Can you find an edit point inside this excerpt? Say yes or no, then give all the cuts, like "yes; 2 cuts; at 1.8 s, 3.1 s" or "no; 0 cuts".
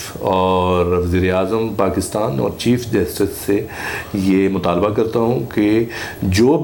no; 0 cuts